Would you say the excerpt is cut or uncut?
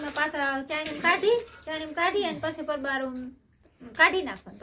uncut